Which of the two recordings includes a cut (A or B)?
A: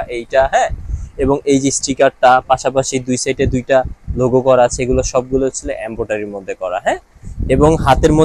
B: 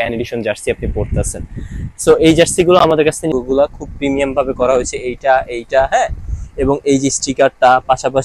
B